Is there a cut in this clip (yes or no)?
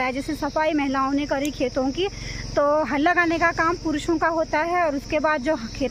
no